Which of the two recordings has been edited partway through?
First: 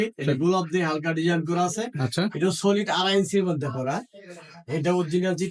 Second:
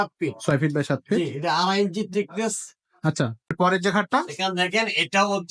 second; 1 cut; at 3.5 s

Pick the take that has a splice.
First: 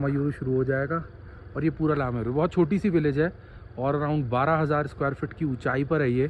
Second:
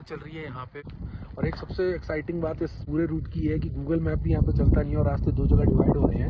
second; 2 cuts; at 0.9 s, 2.8 s

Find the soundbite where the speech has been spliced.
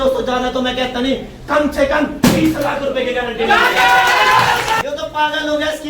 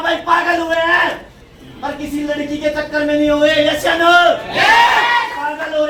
first; 1 cut; at 4.8 s

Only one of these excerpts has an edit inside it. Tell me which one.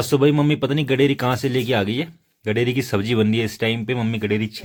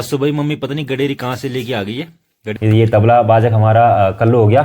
second; 1 cut; at 2.4 s

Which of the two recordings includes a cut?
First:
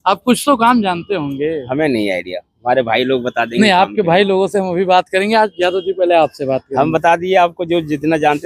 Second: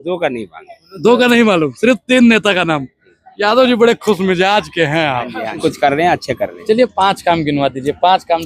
second; 1 cut; at 5.6 s

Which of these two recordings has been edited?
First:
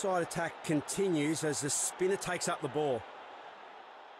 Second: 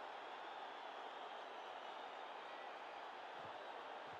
first; 1 cut; at 3.0 s

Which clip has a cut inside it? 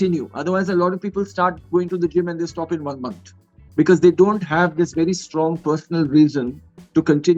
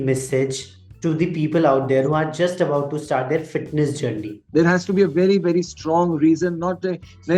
second; 1 cut; at 4.3 s

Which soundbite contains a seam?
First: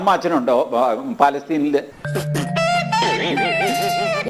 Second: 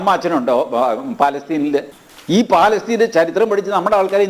second; 1 cut; at 2.1 s

